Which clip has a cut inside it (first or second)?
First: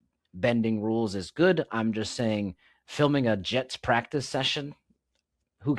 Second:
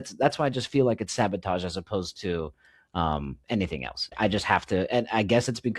second